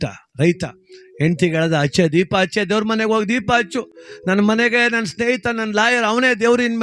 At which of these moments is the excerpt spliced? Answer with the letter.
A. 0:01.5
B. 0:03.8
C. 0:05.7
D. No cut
D